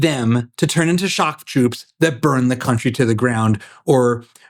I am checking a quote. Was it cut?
no; 0 cuts

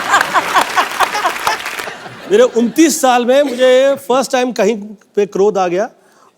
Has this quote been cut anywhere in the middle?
yes; 1 cut; at 1.7 s

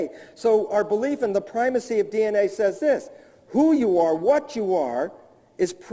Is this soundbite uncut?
yes; 0 cuts

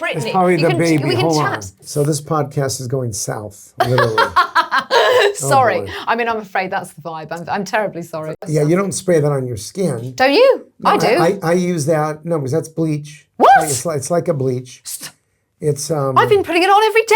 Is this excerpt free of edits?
no; 2 cuts; at 1.7 s, 8.5 s

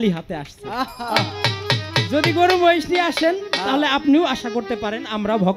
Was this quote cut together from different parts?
no; 0 cuts

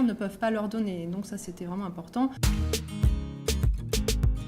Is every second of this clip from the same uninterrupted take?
yes; 0 cuts

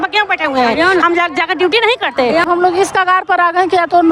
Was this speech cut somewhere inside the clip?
yes; 1 cut; at 2.4 s

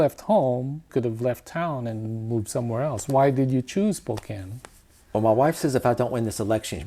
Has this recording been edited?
yes; 1 cut; at 0.9 s

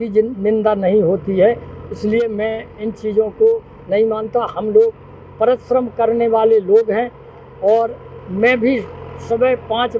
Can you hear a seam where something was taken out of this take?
no; 0 cuts

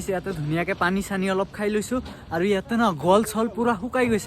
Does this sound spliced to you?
no; 0 cuts

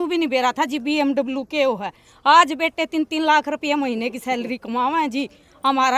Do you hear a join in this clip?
no; 0 cuts

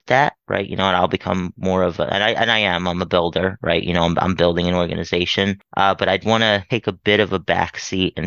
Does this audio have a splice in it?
yes; 1 cut; at 6.6 s

